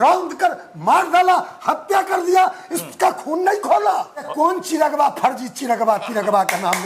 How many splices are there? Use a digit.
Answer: 1